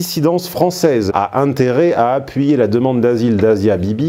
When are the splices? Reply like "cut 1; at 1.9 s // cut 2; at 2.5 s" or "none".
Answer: cut 1; at 1.1 s